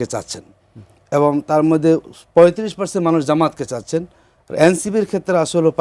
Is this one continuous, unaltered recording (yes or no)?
yes